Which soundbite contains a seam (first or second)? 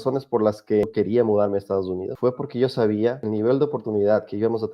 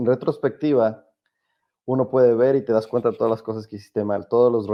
first